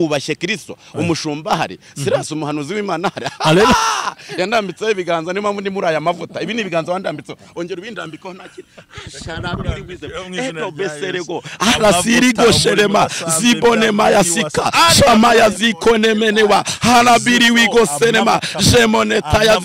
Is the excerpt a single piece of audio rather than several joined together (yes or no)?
yes